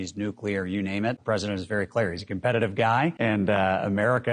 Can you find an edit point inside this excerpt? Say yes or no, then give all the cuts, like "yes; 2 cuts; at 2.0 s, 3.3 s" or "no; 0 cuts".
yes; 2 cuts; at 1.2 s, 3.2 s